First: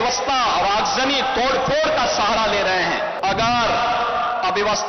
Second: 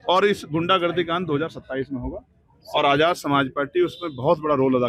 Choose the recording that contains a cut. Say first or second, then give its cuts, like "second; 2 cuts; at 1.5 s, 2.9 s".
first; 1 cut; at 3.2 s